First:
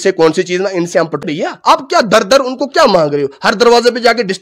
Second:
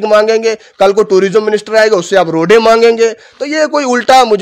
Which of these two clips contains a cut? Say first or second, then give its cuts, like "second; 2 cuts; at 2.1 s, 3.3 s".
first; 1 cut; at 1.2 s